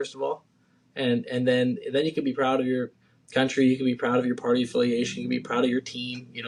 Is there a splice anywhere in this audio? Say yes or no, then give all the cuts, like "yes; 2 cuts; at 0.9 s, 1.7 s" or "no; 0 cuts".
no; 0 cuts